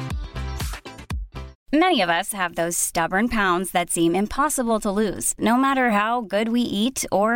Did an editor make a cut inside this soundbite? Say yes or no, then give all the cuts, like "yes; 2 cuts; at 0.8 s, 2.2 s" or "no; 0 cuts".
yes; 1 cut; at 1.5 s